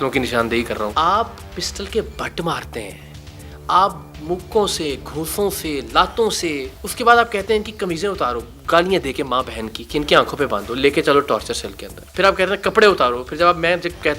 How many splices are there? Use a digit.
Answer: 1